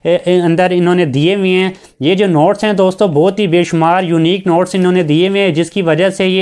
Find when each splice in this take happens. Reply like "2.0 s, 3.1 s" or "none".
none